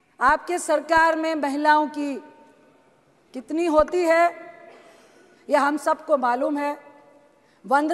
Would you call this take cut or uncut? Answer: uncut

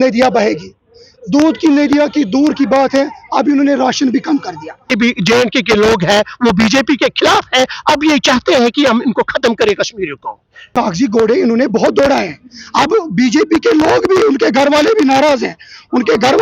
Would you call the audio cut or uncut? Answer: cut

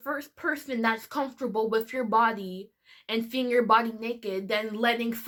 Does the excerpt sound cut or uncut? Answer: uncut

